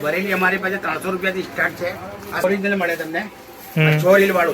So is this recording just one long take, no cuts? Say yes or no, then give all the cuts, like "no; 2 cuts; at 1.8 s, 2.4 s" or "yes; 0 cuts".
no; 1 cut; at 2.4 s